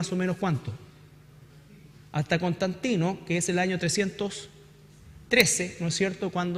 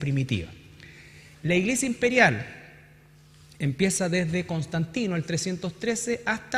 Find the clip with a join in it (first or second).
first